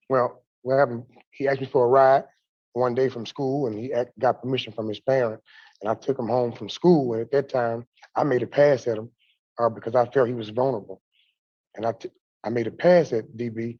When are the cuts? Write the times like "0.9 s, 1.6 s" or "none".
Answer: none